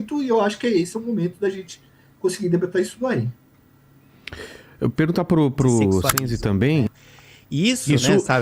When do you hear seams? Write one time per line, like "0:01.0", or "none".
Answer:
0:06.9